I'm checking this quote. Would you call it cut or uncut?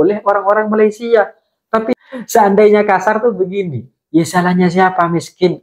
cut